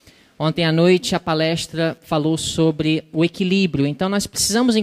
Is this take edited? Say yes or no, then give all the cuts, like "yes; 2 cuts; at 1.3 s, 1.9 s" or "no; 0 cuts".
yes; 1 cut; at 1.5 s